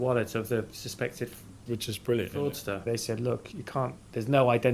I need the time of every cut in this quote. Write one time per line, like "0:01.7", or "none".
0:02.8